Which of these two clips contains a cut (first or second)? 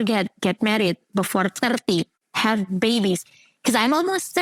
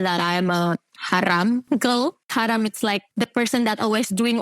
second